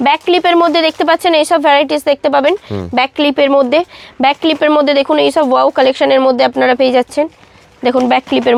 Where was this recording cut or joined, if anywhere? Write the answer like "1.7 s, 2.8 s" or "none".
none